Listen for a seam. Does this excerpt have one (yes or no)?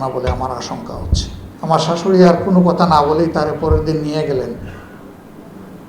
yes